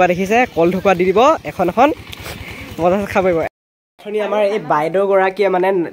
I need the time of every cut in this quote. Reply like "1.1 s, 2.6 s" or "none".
3.5 s